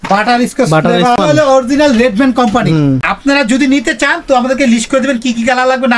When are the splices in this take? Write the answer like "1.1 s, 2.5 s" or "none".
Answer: 1.2 s, 3.1 s